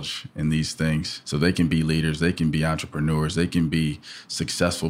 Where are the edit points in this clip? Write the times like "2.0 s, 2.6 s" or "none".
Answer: 1.2 s